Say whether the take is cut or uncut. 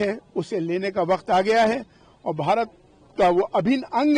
uncut